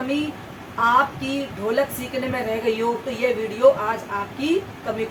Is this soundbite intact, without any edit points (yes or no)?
yes